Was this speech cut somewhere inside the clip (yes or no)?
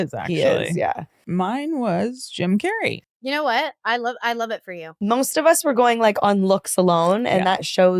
yes